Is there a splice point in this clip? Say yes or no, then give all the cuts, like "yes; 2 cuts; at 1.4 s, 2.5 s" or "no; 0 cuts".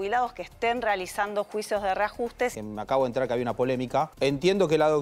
yes; 2 cuts; at 2.6 s, 4.1 s